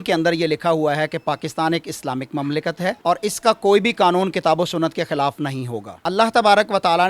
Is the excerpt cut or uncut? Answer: uncut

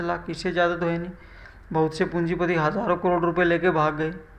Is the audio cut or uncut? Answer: uncut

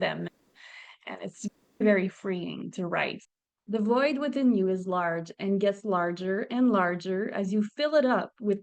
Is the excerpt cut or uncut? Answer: cut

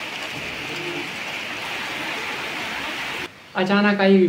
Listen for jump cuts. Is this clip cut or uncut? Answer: cut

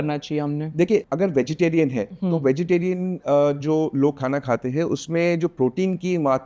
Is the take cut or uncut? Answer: cut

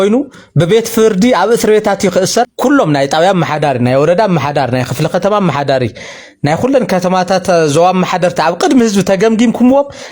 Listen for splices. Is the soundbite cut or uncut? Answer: cut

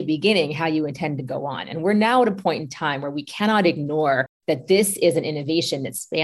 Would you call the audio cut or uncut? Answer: cut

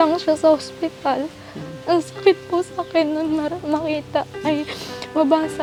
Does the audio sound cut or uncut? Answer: uncut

